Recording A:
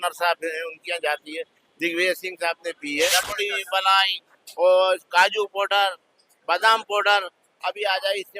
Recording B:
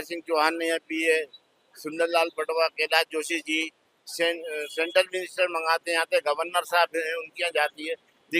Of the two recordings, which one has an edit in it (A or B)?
A